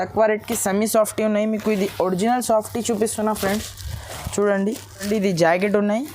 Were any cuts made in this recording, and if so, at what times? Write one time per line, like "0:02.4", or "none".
0:05.1